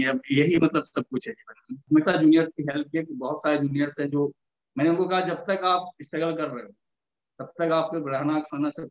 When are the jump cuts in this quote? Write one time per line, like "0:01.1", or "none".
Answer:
0:01.8